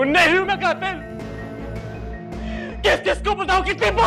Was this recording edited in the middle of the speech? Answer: no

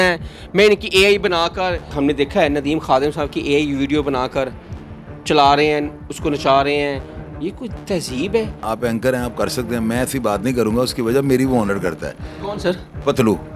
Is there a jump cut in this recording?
yes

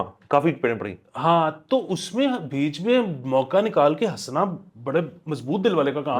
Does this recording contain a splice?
no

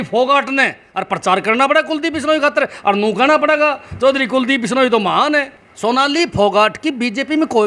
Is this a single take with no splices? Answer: no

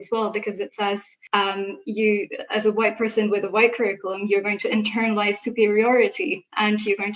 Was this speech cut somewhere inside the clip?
yes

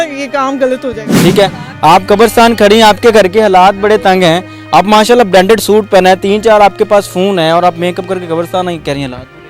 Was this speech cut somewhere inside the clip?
yes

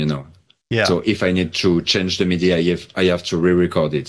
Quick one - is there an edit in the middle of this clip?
no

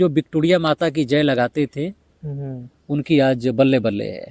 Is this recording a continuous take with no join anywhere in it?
yes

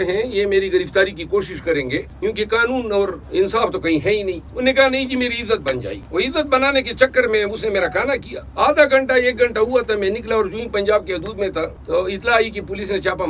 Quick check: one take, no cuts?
no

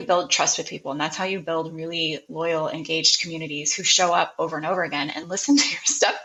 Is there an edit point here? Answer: no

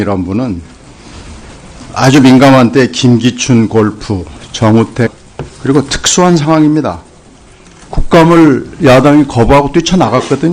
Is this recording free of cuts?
yes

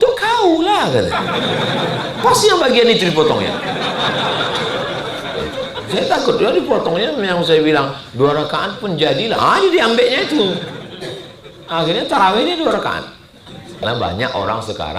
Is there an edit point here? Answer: yes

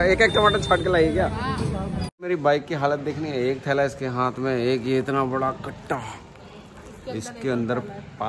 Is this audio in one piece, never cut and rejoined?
yes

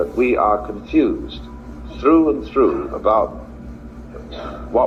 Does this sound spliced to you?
no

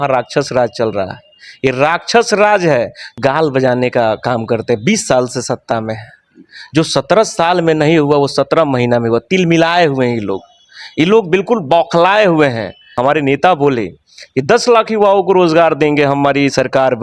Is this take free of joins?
no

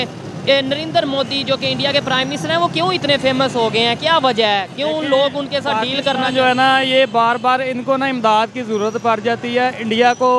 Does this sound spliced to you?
no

